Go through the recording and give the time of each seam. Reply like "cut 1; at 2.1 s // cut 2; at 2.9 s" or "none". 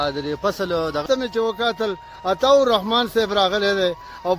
cut 1; at 1.0 s